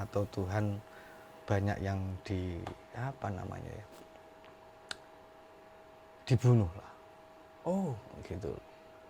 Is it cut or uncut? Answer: uncut